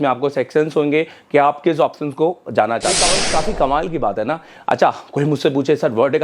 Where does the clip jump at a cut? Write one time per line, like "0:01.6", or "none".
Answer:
0:03.1